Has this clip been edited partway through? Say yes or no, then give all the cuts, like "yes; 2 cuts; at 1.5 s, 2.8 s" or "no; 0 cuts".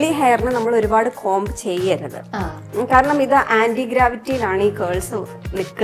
no; 0 cuts